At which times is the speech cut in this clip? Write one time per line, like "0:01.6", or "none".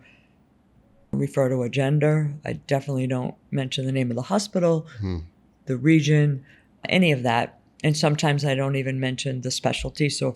0:01.1
0:06.8